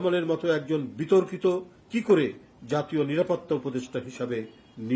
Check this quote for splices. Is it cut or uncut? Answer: cut